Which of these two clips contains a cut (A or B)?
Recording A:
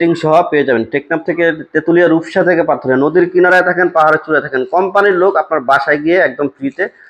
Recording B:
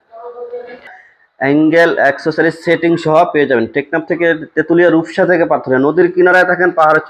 B